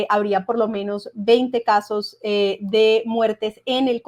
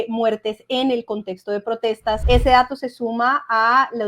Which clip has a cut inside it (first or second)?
second